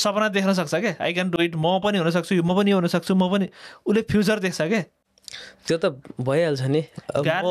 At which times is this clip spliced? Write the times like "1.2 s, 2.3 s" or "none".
none